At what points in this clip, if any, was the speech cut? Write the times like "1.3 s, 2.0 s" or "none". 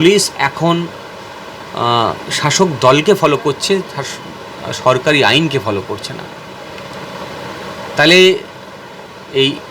none